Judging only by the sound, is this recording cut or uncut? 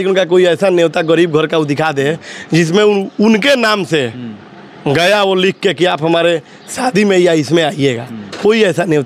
uncut